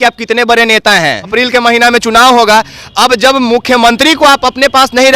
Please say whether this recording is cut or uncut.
cut